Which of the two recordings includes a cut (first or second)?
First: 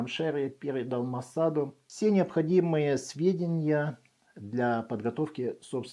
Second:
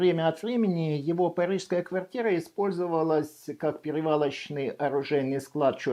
first